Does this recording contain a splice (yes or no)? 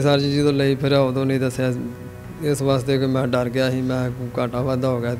no